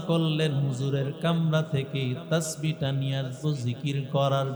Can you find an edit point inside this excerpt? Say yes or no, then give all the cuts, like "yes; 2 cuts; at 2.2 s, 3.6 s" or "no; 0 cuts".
no; 0 cuts